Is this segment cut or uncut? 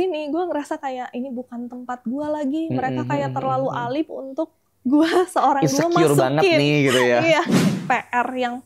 cut